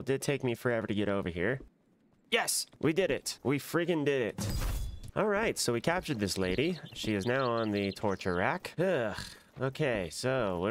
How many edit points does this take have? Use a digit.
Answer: 1